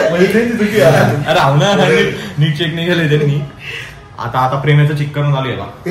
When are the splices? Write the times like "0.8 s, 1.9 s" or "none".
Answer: none